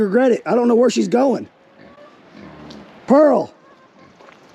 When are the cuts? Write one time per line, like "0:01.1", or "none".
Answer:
none